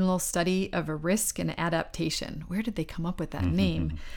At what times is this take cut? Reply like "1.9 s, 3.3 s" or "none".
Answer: none

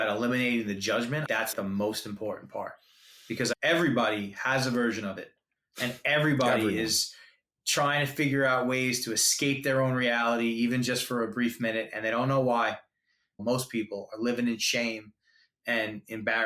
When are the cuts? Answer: 1.5 s, 3.5 s, 7.5 s, 13.4 s

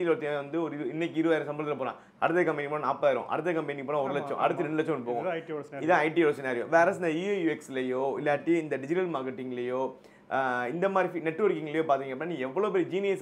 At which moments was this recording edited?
none

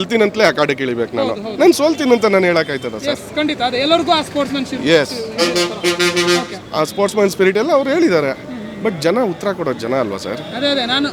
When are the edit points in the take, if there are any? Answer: none

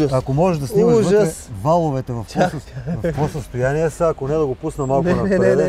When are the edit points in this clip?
none

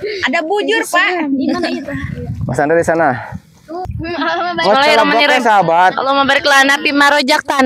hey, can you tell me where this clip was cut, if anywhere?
3.8 s

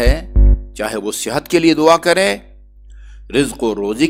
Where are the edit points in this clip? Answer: none

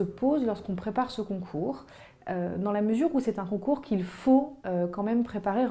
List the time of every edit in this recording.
none

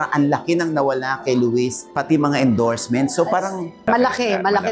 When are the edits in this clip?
1.8 s, 3.7 s

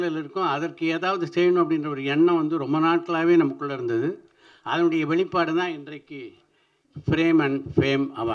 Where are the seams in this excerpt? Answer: none

